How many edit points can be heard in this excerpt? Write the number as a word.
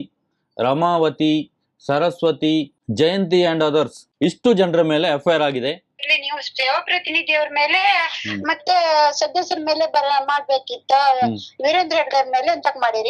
one